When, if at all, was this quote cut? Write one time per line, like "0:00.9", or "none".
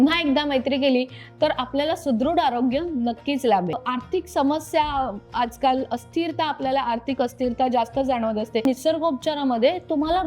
0:03.8
0:08.6